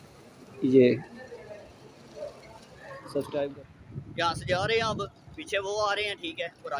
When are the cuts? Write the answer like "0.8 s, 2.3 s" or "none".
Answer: 3.5 s

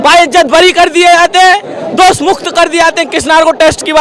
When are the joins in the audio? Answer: none

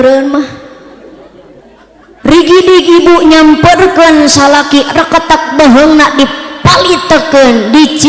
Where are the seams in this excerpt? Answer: 1.6 s

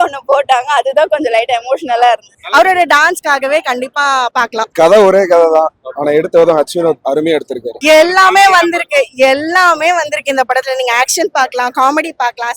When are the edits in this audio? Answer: 2.3 s, 4.4 s, 7.7 s

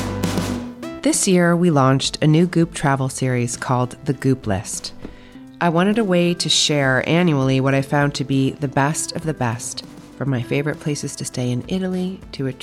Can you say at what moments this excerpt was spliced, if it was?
0.9 s

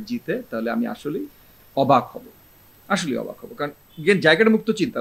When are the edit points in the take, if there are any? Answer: none

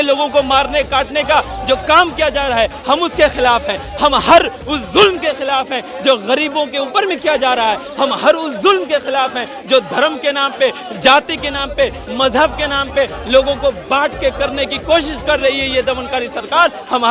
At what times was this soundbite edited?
none

